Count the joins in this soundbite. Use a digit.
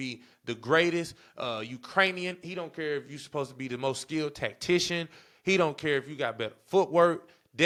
0